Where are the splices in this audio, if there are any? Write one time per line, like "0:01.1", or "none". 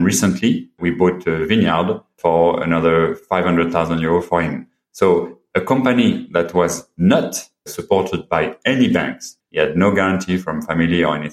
0:09.3